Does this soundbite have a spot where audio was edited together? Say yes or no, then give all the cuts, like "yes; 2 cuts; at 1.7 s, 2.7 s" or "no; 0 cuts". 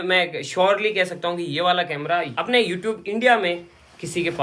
no; 0 cuts